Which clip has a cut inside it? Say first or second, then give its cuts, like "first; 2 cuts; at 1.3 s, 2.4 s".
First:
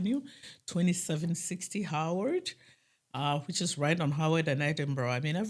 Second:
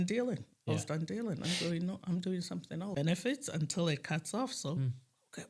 second; 1 cut; at 2.7 s